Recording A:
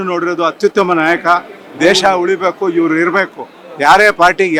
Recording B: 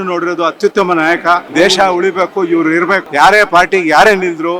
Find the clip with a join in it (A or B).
B